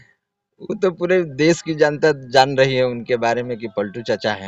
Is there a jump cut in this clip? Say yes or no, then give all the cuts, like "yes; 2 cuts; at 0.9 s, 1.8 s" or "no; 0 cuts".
no; 0 cuts